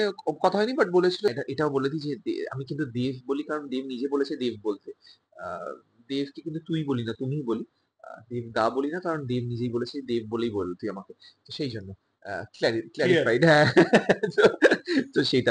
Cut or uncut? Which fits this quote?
cut